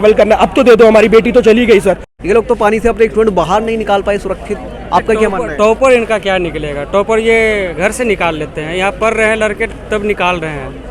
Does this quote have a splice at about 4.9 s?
no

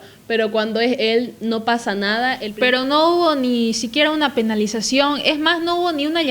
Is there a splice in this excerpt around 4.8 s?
no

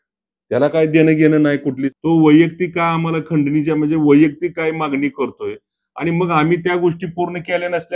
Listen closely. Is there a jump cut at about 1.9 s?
yes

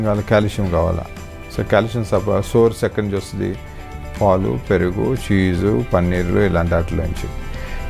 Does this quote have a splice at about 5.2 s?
no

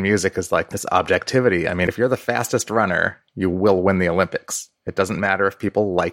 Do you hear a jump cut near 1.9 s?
yes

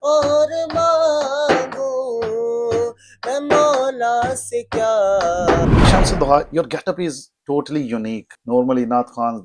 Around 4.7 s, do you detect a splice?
no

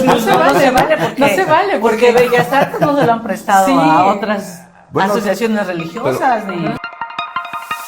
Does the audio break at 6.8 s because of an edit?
yes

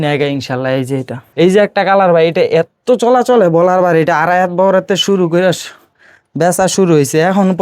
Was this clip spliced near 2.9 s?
no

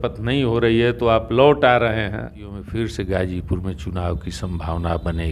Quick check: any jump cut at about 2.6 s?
yes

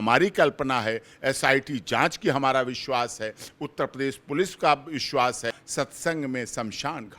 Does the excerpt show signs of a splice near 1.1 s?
no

